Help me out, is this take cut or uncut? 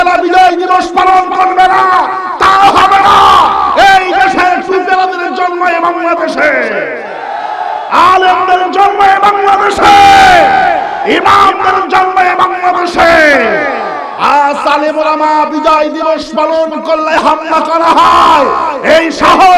uncut